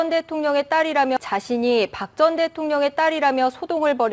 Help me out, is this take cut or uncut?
cut